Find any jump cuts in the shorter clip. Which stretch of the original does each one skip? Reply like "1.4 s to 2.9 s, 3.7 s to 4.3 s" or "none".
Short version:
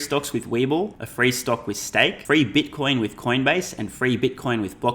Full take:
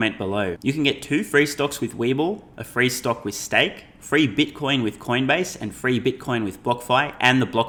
2.5 s to 2.6 s, 3.8 s to 4.0 s